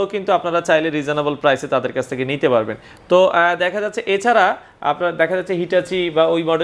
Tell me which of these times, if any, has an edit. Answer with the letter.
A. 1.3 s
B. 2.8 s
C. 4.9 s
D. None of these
D